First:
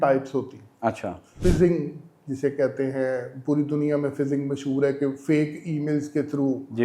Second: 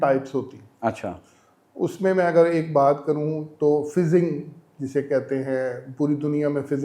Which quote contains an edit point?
first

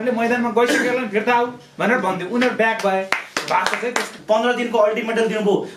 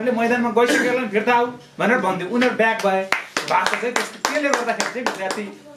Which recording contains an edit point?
first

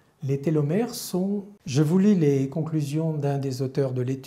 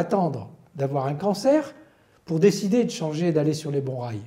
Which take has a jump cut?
first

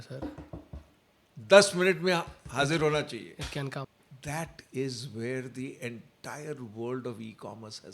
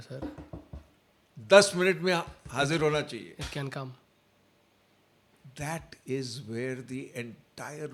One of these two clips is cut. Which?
first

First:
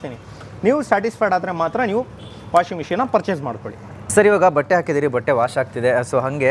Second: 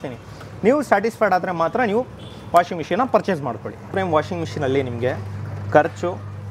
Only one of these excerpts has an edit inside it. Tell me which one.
second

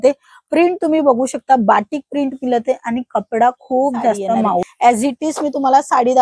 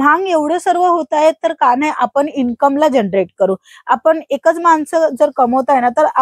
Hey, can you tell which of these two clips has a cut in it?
first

